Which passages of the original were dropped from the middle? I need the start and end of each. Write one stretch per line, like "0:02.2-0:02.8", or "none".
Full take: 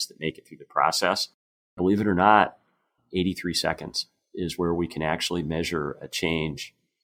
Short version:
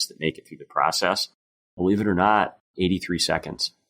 0:02.6-0:03.0